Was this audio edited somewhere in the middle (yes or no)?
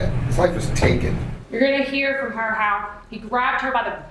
yes